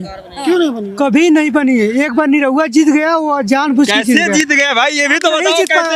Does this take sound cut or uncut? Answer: uncut